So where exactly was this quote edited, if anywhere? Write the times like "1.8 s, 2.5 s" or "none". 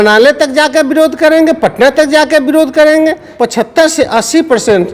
3.3 s